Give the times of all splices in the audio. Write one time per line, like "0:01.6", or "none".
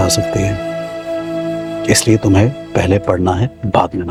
none